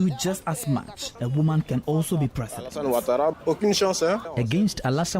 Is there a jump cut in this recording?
yes; 3 cuts; at 1.1 s, 3.4 s, 4.3 s

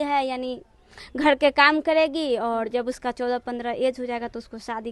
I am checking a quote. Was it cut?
no; 0 cuts

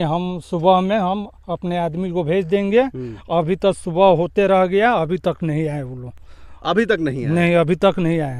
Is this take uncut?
yes; 0 cuts

